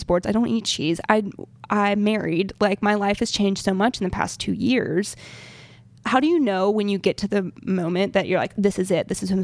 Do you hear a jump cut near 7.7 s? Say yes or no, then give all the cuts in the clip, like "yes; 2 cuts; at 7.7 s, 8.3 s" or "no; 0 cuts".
no; 1 cut; at 6.0 s